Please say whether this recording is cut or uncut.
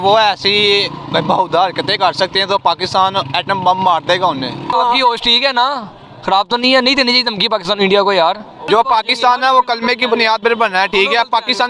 cut